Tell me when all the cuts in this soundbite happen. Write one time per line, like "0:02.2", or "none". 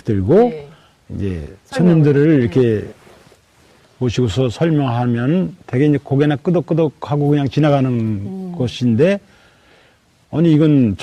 none